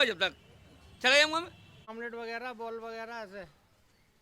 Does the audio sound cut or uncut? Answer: cut